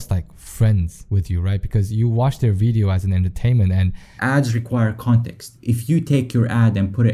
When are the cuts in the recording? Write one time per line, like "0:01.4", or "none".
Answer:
0:01.0
0:04.1
0:05.6